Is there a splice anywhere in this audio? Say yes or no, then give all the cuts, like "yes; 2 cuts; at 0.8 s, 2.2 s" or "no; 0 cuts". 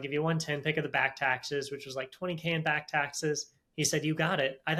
no; 0 cuts